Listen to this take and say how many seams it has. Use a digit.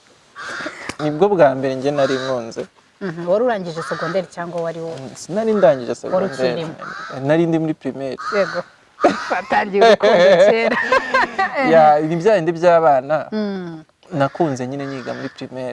1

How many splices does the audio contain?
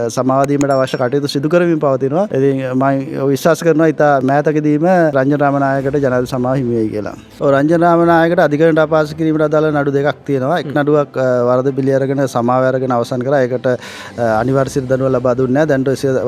3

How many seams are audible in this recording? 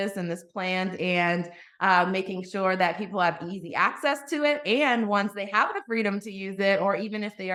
0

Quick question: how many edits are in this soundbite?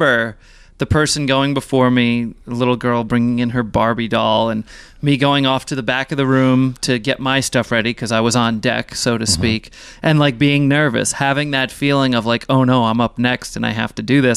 0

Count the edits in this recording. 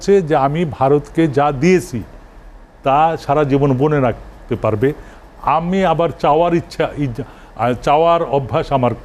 0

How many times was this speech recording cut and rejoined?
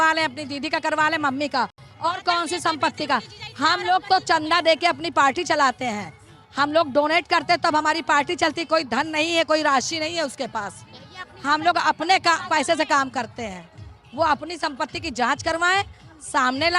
0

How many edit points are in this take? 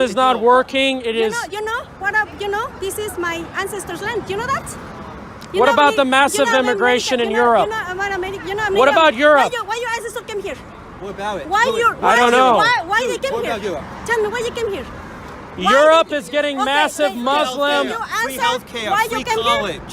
0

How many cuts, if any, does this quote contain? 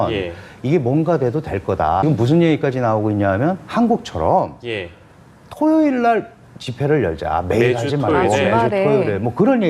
1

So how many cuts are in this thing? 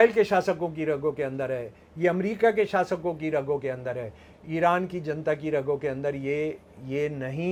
0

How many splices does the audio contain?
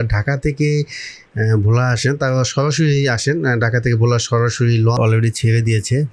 1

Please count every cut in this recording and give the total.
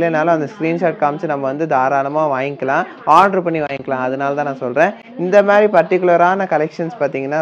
0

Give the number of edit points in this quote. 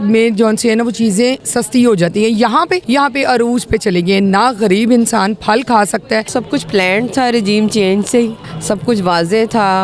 4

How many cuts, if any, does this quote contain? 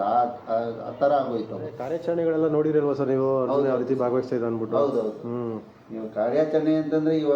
1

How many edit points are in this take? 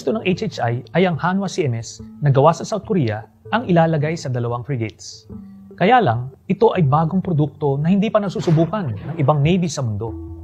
1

